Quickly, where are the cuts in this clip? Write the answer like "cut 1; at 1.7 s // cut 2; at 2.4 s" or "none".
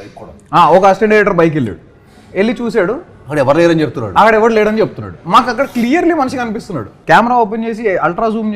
cut 1; at 6.9 s